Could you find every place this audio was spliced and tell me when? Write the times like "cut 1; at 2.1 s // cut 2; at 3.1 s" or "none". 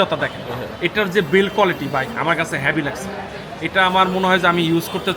none